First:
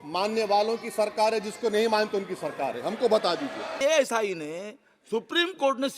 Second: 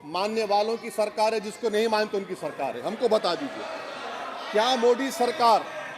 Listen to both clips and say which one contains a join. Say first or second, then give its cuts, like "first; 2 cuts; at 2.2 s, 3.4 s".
first; 1 cut; at 3.8 s